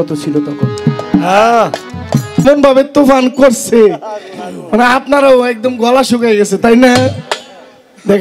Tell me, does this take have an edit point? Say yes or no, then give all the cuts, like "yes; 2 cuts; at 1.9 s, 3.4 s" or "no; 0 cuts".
yes; 1 cut; at 2.4 s